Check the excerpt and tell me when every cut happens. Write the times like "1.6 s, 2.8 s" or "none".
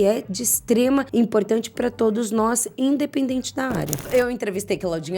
1.1 s, 4.1 s